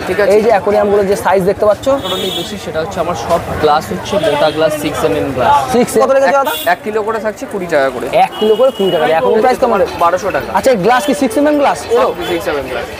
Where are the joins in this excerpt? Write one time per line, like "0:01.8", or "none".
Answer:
0:02.1
0:06.0
0:09.4